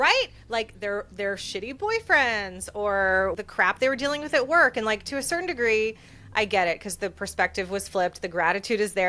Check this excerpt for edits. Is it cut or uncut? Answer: cut